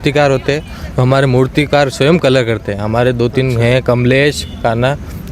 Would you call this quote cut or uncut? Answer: uncut